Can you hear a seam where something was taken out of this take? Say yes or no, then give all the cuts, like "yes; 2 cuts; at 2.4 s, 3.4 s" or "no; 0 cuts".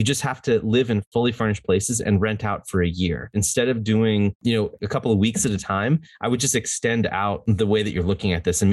yes; 4 cuts; at 1.1 s, 3.3 s, 4.7 s, 7.4 s